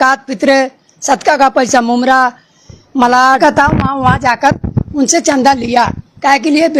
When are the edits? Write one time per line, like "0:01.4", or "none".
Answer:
0:03.4